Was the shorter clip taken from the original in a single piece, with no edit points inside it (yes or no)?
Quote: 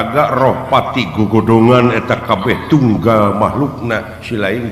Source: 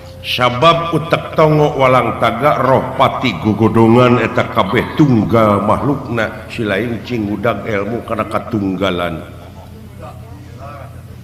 yes